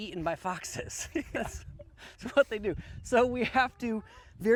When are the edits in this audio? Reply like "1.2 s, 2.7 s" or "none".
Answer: none